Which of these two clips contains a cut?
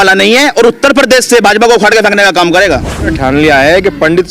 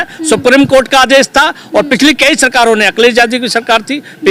first; 1 cut; at 3.2 s

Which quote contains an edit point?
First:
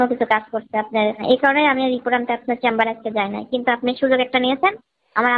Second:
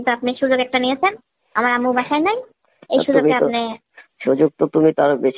first; 1 cut; at 1.2 s

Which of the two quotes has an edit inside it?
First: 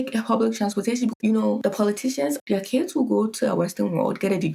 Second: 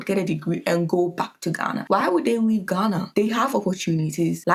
first; 2 cuts; at 1.2 s, 2.4 s

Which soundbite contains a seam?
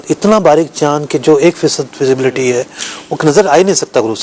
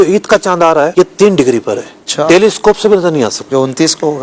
second; 2 cuts; at 0.9 s, 3.4 s

